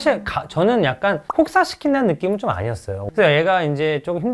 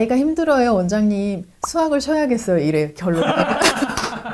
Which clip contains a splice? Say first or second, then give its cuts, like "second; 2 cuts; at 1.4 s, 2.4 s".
first; 1 cut; at 3.0 s